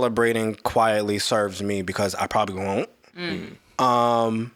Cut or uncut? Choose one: uncut